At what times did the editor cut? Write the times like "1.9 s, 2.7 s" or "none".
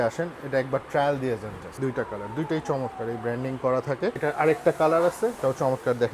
1.6 s, 4.2 s, 5.4 s